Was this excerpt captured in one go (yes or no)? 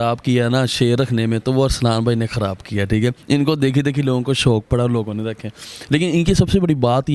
yes